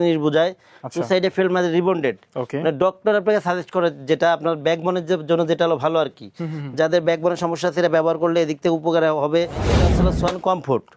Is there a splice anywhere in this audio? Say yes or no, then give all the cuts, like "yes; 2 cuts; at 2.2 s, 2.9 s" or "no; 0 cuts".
yes; 1 cut; at 9.8 s